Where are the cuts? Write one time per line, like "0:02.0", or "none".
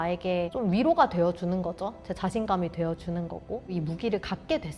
0:03.6